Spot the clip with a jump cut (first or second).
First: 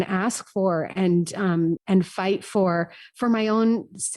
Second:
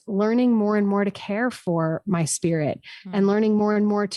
first